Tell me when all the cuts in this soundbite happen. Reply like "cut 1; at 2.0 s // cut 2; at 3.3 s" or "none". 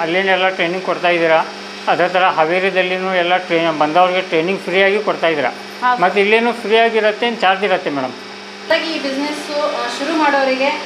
cut 1; at 8.7 s